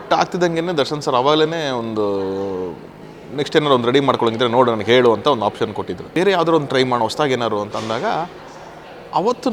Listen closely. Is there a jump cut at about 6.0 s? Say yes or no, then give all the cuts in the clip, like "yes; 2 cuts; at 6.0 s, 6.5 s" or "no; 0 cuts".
yes; 1 cut; at 6.0 s